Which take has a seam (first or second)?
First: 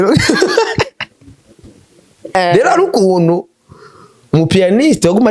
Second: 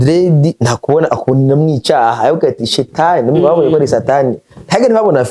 first